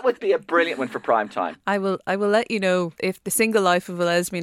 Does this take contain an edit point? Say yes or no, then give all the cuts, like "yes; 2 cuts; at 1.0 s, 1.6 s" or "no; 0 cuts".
yes; 1 cut; at 2.9 s